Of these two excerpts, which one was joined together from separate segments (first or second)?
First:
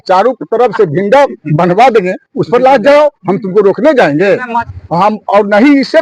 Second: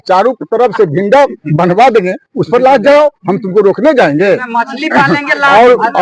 first